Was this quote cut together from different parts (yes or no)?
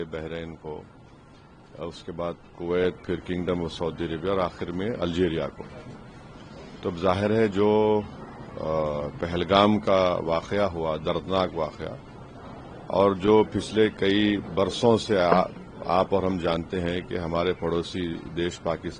no